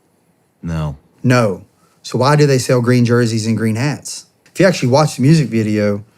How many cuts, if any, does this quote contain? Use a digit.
1